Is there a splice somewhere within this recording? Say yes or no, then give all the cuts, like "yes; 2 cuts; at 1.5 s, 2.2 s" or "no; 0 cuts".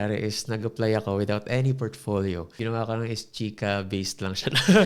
no; 0 cuts